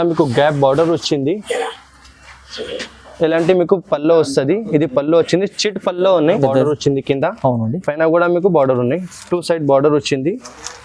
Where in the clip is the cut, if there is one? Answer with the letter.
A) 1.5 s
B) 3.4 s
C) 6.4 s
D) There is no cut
C